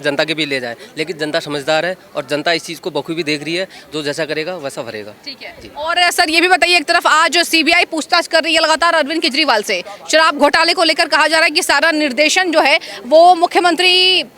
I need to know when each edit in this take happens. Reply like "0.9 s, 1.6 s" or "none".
none